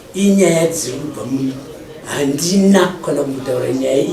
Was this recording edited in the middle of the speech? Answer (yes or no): no